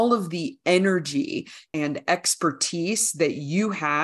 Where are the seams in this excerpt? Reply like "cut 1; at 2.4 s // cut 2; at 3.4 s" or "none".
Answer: cut 1; at 1.6 s